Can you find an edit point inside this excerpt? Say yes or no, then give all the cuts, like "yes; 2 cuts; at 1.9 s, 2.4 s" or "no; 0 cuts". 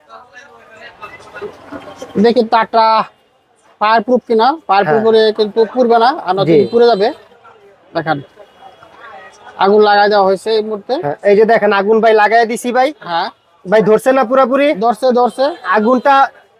no; 0 cuts